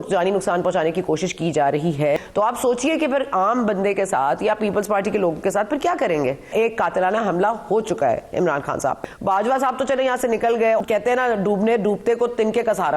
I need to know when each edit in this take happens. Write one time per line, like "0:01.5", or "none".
0:02.2
0:06.5
0:09.0
0:10.8